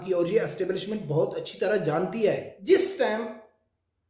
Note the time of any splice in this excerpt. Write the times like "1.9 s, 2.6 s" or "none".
2.5 s